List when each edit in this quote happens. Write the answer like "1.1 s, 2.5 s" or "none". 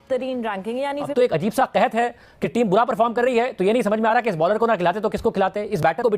1.1 s